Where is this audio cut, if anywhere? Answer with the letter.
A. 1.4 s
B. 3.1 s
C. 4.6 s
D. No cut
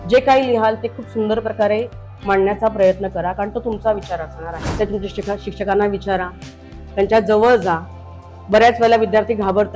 C